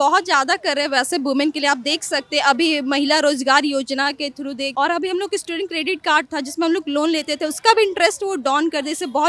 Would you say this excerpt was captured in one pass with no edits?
yes; 0 cuts

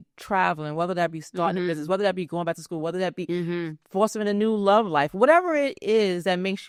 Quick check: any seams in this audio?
no; 0 cuts

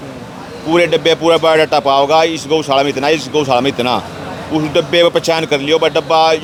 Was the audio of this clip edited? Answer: no; 0 cuts

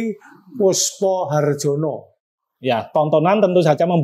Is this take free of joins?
no; 1 cut; at 2.2 s

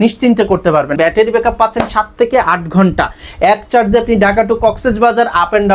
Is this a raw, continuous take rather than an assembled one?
no; 1 cut; at 0.9 s

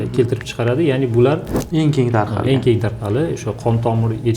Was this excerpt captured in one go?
no; 1 cut; at 1.6 s

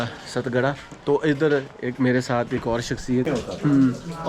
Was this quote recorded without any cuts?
no; 1 cut; at 3.3 s

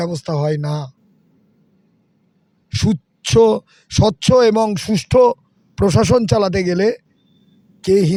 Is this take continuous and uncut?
yes; 0 cuts

